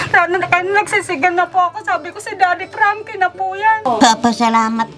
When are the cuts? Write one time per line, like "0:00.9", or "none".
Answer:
0:03.9